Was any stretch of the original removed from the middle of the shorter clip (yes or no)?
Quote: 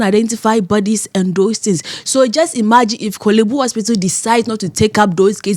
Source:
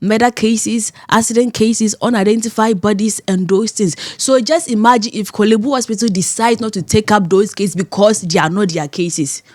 no